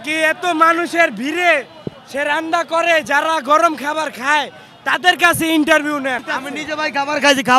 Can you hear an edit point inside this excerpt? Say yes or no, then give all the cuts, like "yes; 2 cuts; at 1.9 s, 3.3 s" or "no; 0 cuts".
yes; 1 cut; at 6.3 s